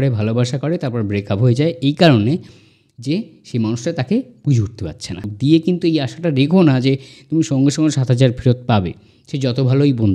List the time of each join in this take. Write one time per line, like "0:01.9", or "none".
0:05.2